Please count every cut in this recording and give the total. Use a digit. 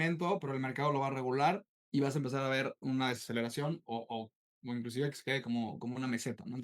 0